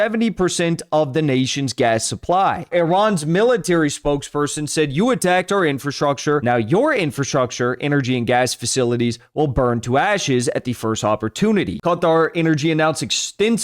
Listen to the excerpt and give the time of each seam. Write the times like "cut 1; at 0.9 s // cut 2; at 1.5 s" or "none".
cut 1; at 2.7 s // cut 2; at 6.4 s // cut 3; at 11.7 s